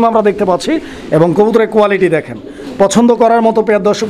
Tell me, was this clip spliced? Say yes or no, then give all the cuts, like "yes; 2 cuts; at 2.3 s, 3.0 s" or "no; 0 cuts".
no; 0 cuts